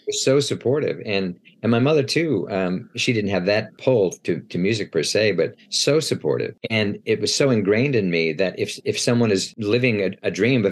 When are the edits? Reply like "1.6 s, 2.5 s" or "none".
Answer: 3.7 s, 6.6 s, 9.5 s